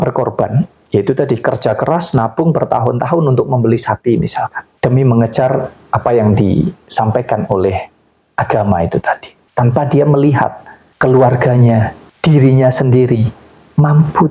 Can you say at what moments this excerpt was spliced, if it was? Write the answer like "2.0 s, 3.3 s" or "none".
4.6 s, 9.4 s